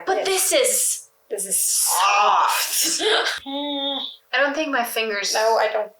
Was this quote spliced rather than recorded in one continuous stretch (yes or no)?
yes